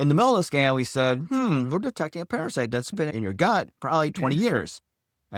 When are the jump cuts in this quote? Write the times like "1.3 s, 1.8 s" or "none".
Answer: none